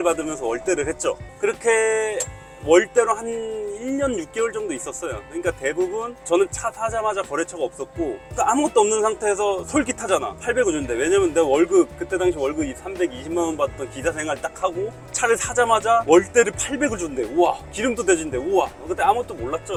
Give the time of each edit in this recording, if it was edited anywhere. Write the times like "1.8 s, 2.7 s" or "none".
none